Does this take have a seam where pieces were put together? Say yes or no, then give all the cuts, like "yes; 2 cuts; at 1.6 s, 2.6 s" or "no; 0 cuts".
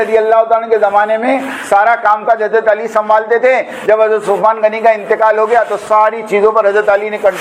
no; 0 cuts